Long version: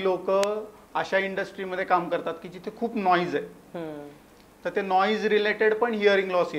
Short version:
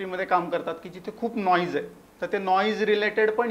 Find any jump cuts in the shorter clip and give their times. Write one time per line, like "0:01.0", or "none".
0:02.0